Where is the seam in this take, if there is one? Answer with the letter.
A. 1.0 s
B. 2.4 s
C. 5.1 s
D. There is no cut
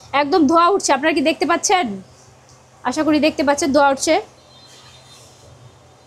D